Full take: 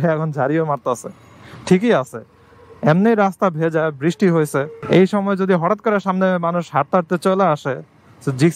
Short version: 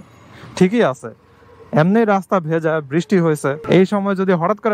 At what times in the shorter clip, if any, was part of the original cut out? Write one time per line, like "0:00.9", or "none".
0:03.6